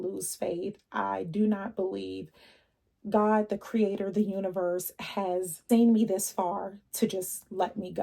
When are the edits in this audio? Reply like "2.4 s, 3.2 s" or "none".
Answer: 5.6 s